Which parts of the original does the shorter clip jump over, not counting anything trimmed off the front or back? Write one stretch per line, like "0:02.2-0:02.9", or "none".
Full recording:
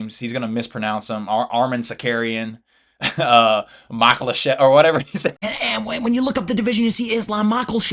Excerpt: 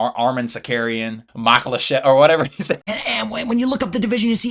0:02.6-0:03.8